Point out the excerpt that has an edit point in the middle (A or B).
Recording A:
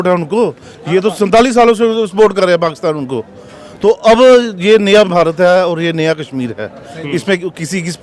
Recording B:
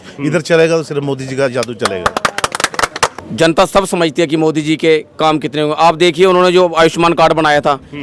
B